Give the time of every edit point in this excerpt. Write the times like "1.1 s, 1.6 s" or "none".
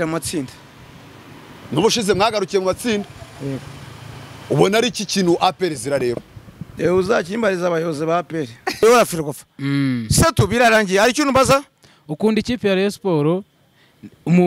8.8 s